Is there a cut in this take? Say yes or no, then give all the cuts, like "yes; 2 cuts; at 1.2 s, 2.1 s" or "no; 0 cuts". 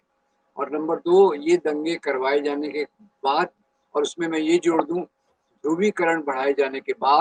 no; 0 cuts